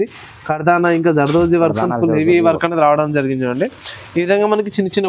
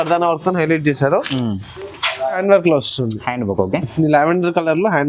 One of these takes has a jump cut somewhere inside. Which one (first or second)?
second